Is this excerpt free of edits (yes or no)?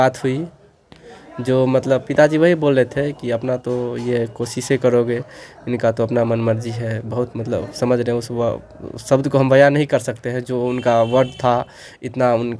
yes